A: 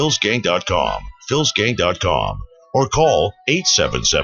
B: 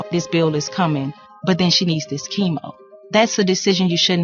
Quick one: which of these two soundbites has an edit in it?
A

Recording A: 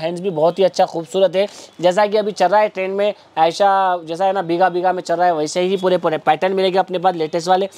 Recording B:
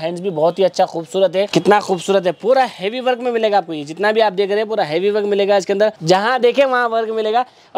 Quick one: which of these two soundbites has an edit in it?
B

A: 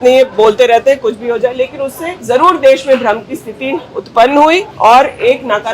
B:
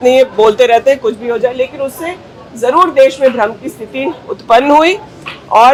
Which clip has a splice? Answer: A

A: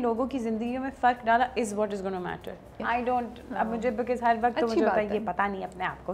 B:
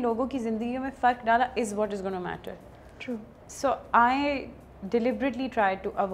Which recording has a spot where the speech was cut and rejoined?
A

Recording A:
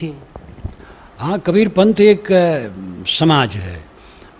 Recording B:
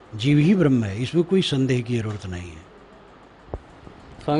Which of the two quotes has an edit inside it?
B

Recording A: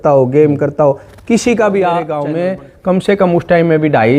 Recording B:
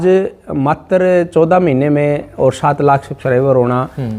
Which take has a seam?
A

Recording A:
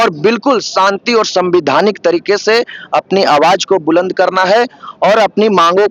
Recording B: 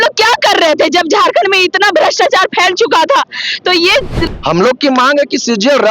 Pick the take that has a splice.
B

